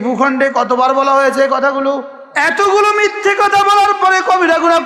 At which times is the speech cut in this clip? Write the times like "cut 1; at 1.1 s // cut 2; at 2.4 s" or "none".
cut 1; at 2.2 s